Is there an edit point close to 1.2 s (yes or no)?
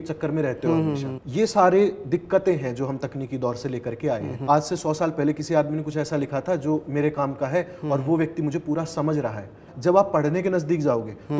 yes